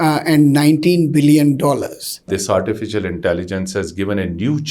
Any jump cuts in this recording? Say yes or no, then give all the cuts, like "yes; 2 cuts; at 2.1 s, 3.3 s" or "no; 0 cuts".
yes; 1 cut; at 2.3 s